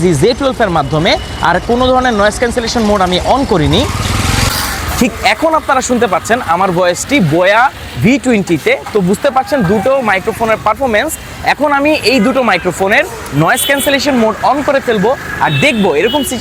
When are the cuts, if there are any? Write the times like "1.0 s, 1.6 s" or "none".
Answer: none